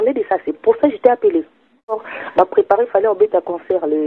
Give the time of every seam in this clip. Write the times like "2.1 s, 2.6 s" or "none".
2.0 s